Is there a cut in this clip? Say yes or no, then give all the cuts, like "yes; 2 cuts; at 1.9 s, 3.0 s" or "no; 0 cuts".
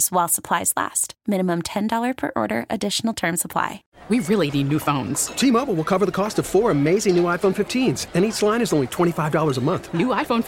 yes; 1 cut; at 3.9 s